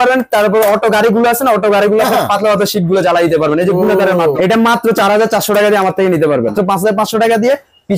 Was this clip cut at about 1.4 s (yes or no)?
no